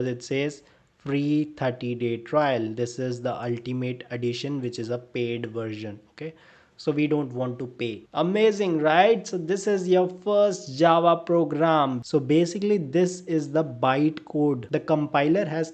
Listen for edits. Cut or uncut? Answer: cut